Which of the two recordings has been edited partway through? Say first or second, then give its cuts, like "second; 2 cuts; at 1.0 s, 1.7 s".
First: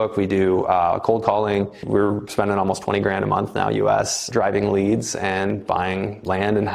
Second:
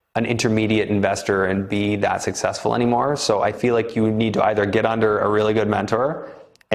first; 2 cuts; at 1.9 s, 4.2 s